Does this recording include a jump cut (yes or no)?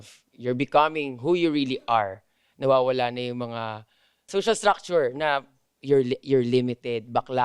yes